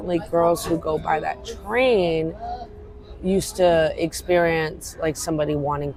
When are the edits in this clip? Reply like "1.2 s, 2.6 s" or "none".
none